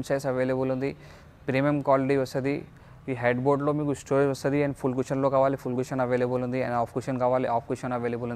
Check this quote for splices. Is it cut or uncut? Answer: uncut